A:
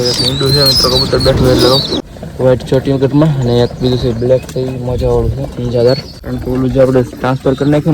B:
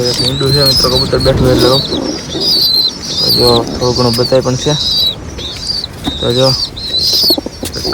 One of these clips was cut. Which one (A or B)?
A